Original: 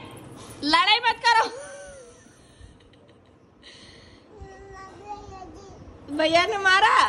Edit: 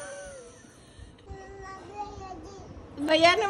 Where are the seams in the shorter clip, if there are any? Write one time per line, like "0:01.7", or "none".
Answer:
0:01.2